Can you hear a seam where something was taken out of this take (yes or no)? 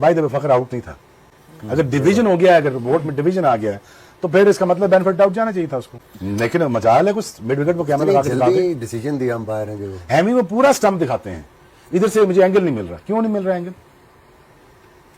no